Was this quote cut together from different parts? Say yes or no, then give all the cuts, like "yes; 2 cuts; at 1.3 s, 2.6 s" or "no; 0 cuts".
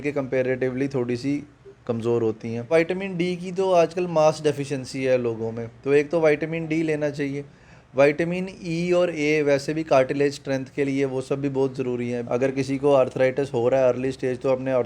yes; 2 cuts; at 2.7 s, 12.2 s